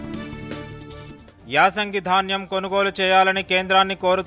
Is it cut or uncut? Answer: cut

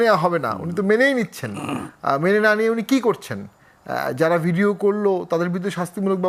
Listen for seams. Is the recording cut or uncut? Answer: uncut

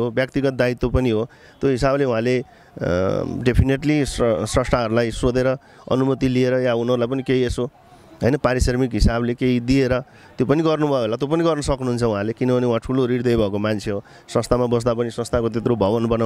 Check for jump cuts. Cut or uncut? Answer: uncut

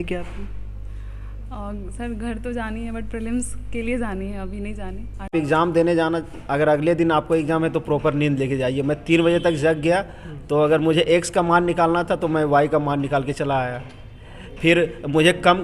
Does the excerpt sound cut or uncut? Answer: cut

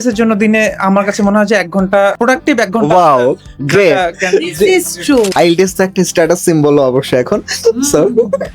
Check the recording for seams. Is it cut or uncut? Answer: cut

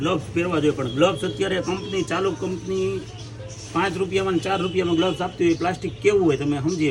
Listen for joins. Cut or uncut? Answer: uncut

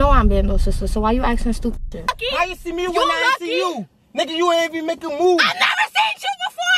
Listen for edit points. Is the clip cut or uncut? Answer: cut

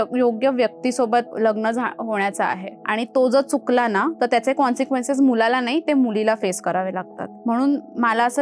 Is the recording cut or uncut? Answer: uncut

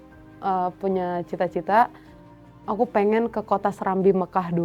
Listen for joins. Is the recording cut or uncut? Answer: uncut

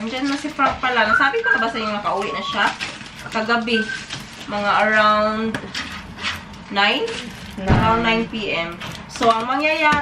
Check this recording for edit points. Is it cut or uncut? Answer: uncut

